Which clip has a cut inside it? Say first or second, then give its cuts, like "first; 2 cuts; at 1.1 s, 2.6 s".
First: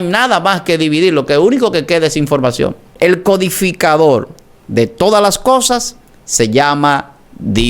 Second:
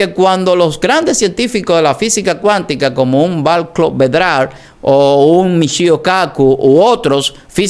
first; 1 cut; at 2.8 s